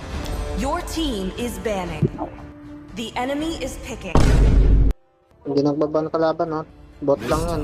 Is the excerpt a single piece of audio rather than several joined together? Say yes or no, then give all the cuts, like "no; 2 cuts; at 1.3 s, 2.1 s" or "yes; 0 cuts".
no; 4 cuts; at 2.2 s, 4.0 s, 5.4 s, 6.7 s